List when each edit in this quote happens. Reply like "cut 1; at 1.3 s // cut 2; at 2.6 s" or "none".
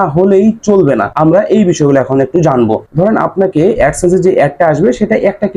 cut 1; at 1.1 s // cut 2; at 2.8 s